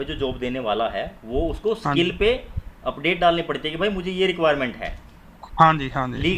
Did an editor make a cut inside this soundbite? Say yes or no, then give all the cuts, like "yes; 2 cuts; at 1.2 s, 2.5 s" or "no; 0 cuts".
no; 0 cuts